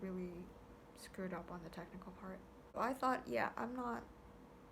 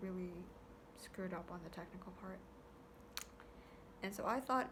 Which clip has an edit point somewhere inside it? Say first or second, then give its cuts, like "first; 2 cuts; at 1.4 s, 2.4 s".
first; 1 cut; at 2.8 s